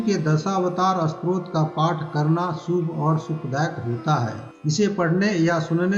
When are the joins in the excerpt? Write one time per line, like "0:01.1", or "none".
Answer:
0:04.5